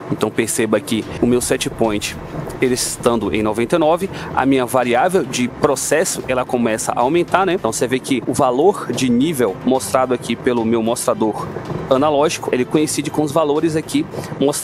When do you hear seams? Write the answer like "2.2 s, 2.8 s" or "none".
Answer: 1.1 s, 8.0 s